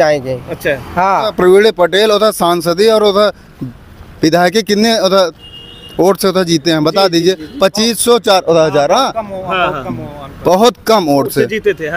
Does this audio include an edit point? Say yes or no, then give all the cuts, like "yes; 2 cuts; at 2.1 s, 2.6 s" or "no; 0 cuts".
yes; 1 cut; at 1.3 s